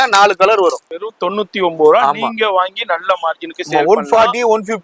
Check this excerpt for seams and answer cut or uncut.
cut